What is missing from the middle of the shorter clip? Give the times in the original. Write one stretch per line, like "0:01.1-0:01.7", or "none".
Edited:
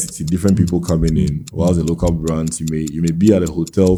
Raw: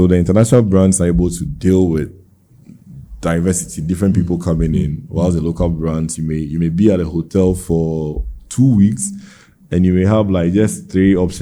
none